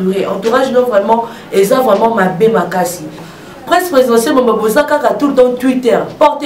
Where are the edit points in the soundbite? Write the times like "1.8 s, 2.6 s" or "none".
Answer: 3.2 s